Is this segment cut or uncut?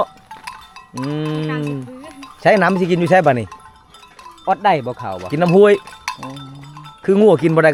uncut